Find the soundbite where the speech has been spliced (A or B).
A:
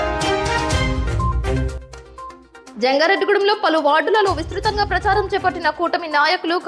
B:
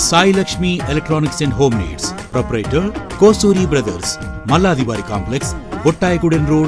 A